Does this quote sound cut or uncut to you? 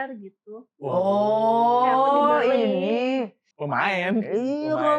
cut